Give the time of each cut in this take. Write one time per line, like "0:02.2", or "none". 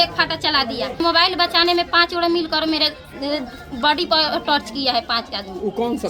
0:01.0